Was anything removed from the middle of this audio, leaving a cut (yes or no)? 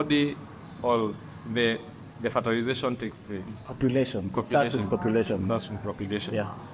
no